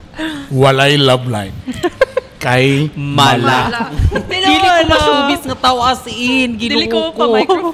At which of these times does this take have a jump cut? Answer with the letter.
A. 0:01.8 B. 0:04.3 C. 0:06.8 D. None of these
B